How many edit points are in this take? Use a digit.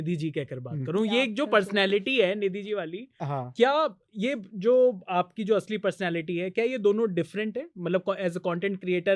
0